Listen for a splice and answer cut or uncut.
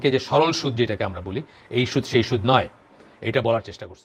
uncut